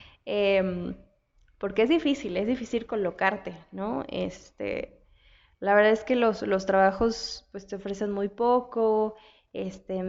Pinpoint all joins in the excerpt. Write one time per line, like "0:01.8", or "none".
none

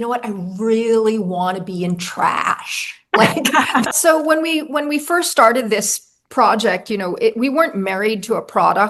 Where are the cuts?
0:03.9

